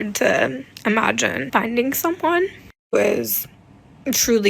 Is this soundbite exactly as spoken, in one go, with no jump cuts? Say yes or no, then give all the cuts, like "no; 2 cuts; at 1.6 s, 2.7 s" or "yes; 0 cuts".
no; 1 cut; at 1.4 s